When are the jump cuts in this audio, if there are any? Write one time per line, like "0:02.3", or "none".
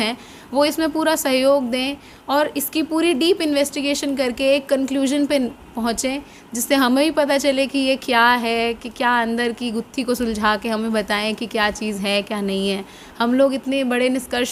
none